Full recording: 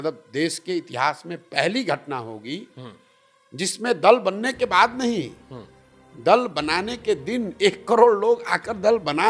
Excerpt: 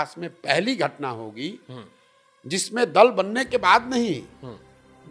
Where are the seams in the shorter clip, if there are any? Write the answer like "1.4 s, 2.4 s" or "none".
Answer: none